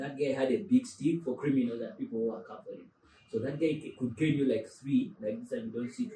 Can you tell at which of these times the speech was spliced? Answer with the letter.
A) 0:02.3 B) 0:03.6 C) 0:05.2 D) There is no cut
D